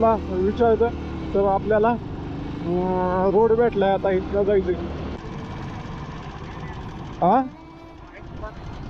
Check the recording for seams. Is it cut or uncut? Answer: cut